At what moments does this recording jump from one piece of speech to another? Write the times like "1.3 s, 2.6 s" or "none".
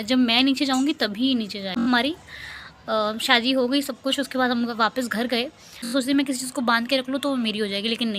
1.9 s, 5.9 s